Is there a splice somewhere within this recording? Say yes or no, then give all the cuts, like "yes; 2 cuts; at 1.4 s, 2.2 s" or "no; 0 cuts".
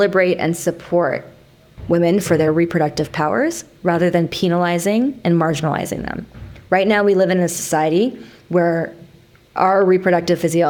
no; 0 cuts